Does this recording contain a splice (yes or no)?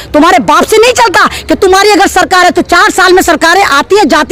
no